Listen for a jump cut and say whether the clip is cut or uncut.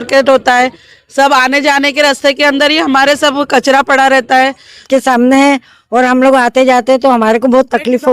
cut